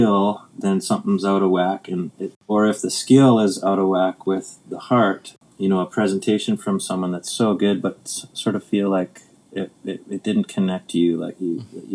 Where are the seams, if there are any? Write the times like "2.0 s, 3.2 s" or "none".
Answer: 2.4 s, 5.4 s